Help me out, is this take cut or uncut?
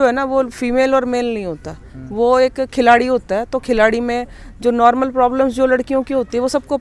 uncut